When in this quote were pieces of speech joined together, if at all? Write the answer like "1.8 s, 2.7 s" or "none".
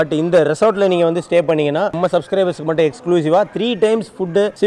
1.9 s